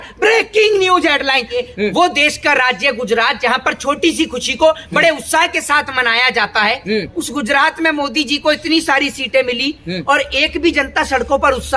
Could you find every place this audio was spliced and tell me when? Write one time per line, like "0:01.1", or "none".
0:01.6